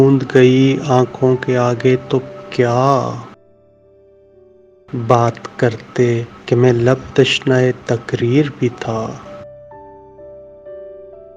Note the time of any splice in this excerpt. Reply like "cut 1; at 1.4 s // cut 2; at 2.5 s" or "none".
none